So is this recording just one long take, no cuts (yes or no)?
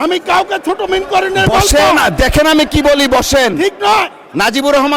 yes